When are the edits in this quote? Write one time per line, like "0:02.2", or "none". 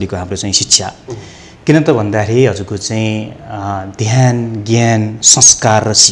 none